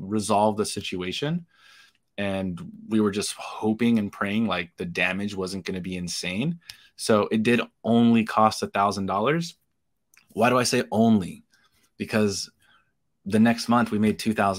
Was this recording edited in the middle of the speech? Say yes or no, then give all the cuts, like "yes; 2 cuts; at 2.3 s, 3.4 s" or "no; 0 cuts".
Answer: no; 0 cuts